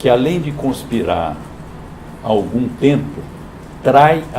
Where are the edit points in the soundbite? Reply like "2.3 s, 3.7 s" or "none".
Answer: 2.7 s